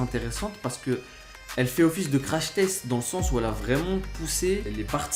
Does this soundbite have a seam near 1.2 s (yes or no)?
no